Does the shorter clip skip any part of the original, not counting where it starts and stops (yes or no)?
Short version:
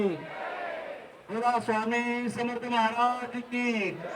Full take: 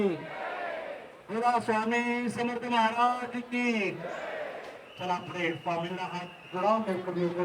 no